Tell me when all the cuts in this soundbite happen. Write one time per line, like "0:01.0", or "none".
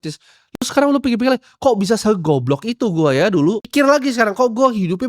0:03.7